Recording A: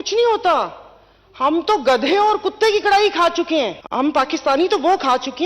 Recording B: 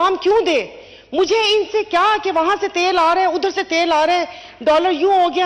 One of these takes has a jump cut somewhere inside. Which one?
A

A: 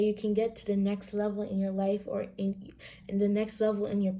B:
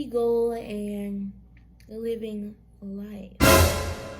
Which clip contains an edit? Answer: B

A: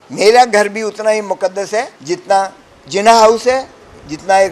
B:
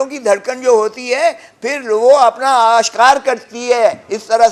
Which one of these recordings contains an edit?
A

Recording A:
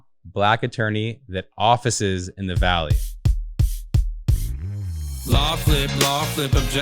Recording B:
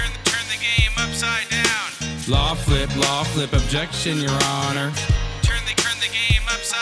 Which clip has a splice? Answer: A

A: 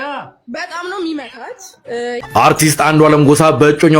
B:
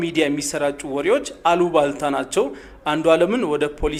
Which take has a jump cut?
A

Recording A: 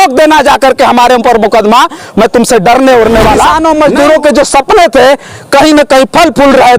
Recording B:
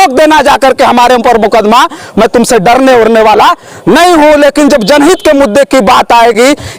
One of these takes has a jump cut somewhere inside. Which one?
A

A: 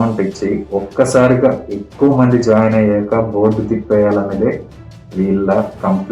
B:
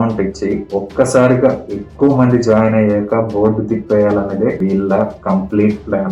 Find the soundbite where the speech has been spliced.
B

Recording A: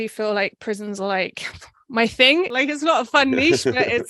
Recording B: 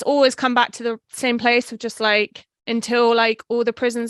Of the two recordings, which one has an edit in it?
A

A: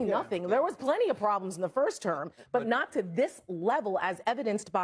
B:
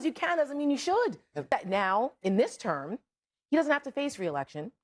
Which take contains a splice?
B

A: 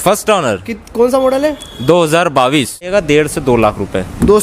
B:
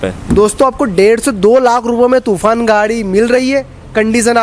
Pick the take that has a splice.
A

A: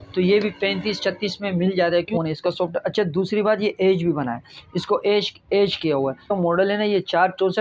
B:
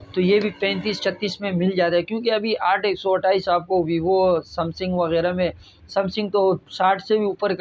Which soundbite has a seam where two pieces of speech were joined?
A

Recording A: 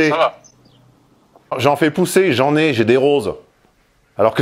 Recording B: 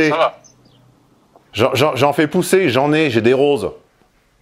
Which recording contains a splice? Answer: A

